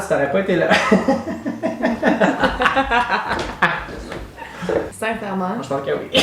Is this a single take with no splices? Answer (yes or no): yes